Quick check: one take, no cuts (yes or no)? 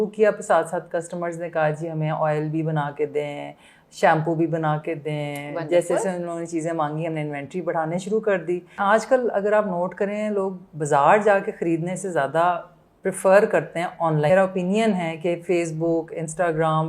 no